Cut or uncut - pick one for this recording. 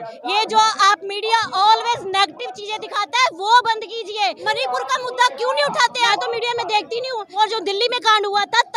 cut